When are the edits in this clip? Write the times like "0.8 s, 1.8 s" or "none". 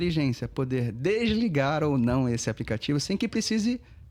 none